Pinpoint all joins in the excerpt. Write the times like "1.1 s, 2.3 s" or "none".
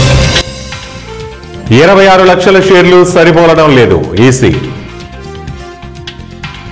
1.4 s

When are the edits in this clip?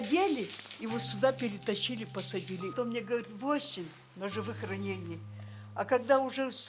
2.7 s

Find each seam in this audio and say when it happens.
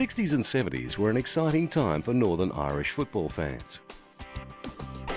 3.2 s

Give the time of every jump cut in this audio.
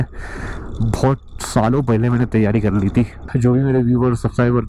3.2 s

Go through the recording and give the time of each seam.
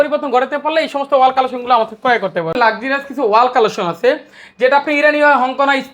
2.5 s

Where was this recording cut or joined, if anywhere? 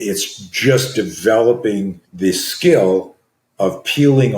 2.0 s

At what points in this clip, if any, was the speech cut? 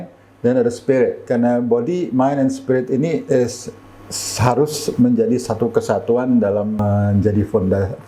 1.2 s, 6.8 s

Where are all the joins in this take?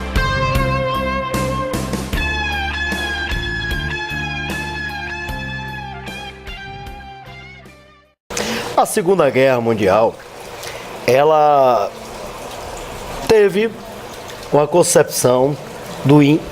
11.3 s

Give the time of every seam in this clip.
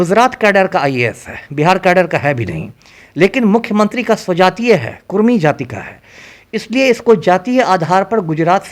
none

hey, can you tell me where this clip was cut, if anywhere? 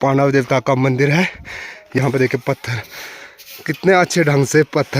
2.0 s

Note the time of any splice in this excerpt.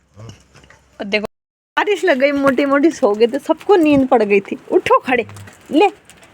1.2 s

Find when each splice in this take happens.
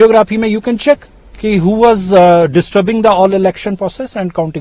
none

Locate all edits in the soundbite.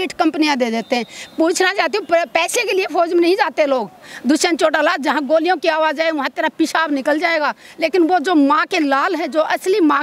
4.1 s

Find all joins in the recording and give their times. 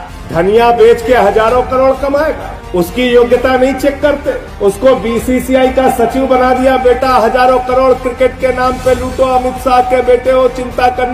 none

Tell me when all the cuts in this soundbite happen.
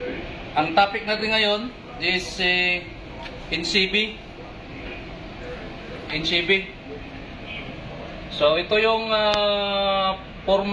none

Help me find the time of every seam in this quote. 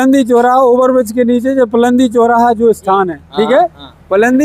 none

